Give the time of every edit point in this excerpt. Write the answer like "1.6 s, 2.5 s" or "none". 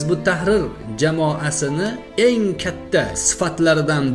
2.0 s, 3.1 s